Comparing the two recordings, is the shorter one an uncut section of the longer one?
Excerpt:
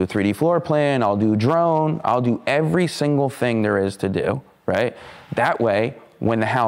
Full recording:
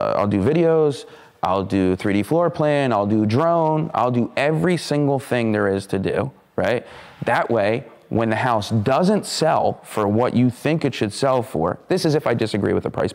yes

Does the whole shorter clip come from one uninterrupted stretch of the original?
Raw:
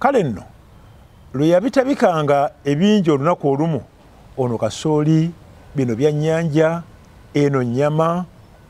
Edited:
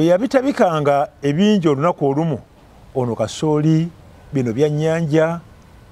yes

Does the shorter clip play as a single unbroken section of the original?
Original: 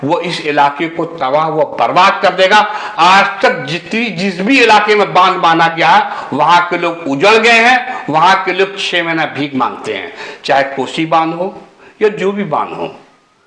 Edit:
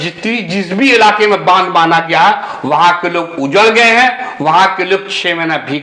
yes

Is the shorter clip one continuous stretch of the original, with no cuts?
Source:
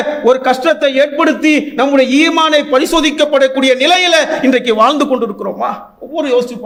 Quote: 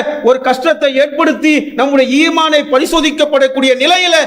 yes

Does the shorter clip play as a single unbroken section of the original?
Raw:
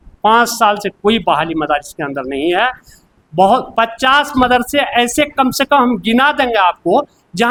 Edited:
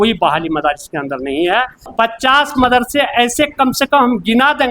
no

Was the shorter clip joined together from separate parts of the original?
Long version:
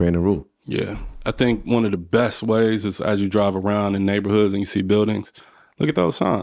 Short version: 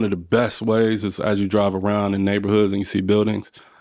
no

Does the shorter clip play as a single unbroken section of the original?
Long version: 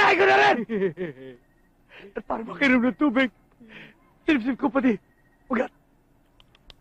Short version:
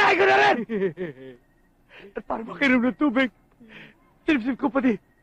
yes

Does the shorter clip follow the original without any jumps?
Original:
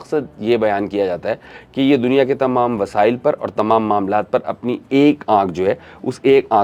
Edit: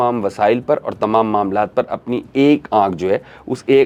yes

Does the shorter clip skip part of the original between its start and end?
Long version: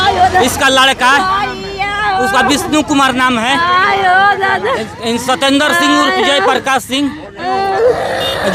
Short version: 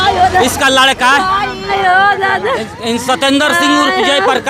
yes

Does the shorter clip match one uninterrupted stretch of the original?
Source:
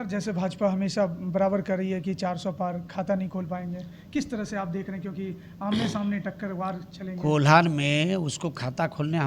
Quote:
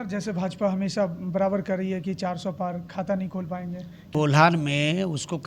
no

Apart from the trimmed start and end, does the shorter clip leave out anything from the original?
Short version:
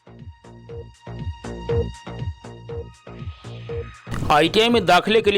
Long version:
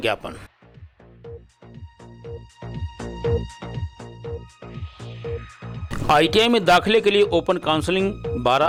yes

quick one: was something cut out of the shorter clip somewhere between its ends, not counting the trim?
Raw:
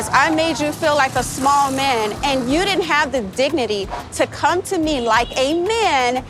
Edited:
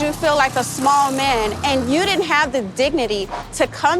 no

